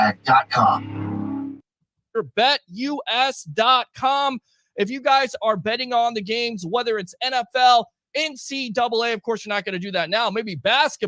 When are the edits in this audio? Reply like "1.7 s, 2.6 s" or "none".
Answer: 1.6 s

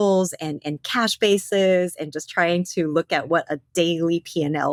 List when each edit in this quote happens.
none

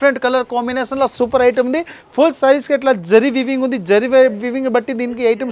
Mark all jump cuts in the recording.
none

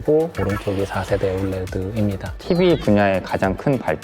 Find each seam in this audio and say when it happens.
2.3 s

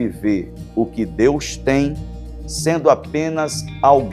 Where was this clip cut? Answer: none

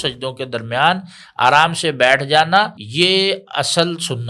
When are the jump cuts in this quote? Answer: 2.8 s

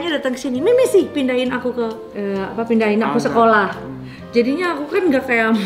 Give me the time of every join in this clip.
none

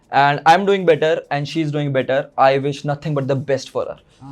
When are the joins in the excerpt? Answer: none

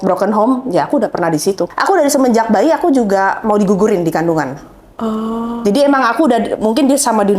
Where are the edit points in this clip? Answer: 1.6 s

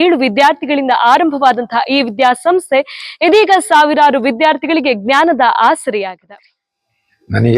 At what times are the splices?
6.2 s

